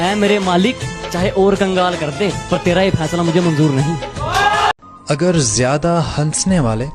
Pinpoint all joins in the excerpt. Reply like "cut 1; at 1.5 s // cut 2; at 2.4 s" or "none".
cut 1; at 4.9 s